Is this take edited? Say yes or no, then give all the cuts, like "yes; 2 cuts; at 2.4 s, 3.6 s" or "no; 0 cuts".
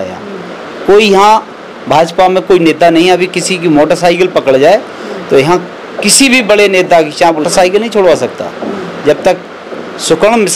yes; 1 cut; at 7.5 s